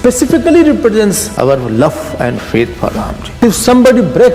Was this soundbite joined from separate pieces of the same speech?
yes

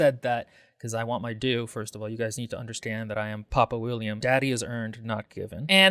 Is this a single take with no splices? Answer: no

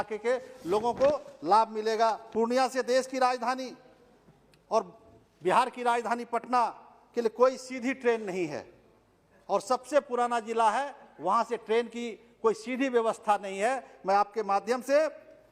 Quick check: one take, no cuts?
no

